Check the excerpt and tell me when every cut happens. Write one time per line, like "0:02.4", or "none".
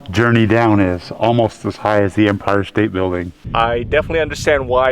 0:03.4